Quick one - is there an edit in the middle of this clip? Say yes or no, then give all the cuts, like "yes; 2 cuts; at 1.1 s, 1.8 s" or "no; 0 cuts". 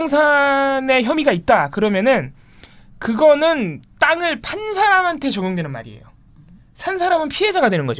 no; 0 cuts